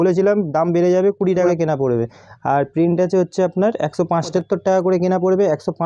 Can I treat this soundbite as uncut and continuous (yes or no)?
no